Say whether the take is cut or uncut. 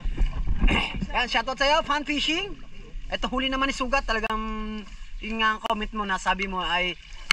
uncut